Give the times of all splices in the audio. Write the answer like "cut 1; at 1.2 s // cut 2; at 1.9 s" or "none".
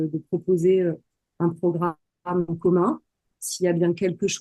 cut 1; at 3.3 s